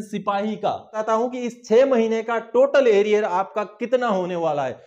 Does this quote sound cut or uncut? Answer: cut